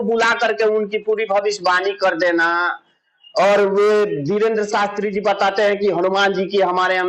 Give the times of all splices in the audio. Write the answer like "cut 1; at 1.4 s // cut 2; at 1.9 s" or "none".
none